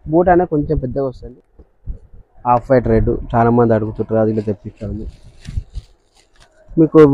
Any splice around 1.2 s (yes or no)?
yes